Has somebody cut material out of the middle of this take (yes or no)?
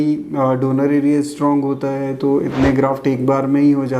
no